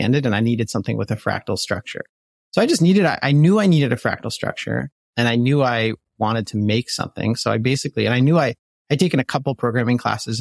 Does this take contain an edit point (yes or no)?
no